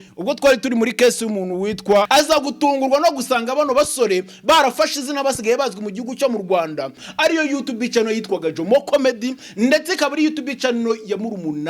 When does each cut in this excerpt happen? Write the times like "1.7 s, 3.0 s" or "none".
2.1 s, 7.0 s